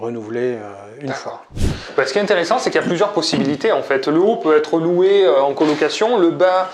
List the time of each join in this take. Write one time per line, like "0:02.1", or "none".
0:01.5